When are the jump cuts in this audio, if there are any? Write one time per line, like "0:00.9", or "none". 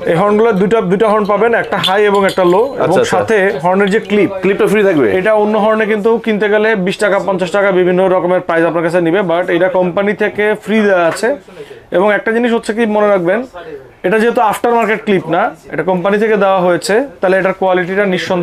none